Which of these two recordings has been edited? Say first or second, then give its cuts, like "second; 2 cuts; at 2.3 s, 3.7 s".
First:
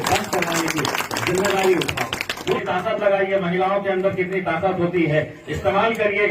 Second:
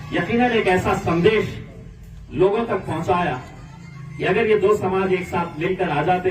first; 1 cut; at 2.6 s